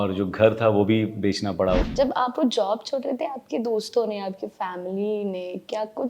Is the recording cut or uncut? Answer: cut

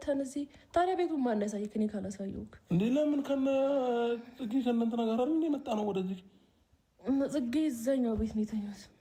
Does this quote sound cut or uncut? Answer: uncut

